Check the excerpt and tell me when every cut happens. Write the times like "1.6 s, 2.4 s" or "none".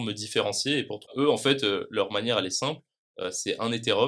1.1 s